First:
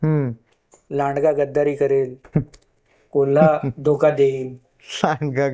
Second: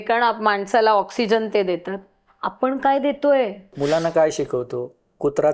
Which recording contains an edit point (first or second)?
second